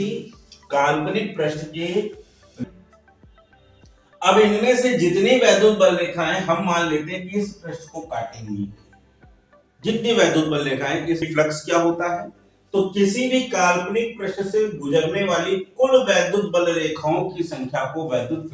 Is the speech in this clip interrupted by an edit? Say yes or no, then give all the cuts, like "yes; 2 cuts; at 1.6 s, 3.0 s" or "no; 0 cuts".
yes; 2 cuts; at 2.6 s, 11.2 s